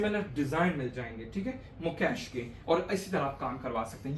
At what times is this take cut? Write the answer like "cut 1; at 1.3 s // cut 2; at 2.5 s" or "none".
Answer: none